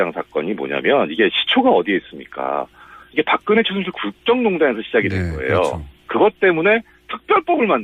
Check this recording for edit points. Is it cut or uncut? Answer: uncut